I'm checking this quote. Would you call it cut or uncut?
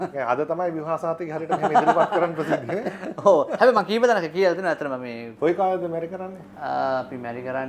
uncut